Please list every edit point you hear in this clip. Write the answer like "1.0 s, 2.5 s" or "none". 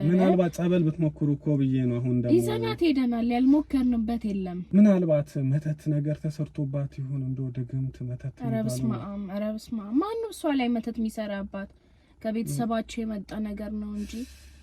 4.5 s